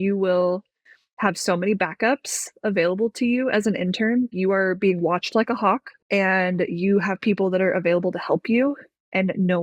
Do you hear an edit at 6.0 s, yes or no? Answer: yes